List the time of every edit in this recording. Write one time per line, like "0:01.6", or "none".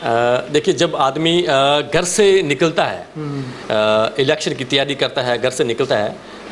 none